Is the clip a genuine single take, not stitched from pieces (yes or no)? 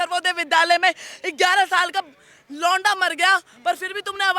yes